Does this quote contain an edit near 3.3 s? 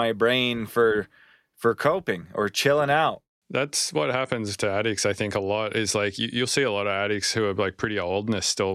yes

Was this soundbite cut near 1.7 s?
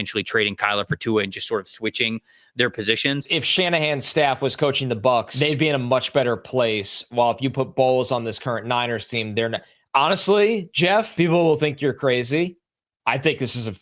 no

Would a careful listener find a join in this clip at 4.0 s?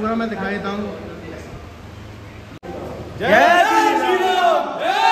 no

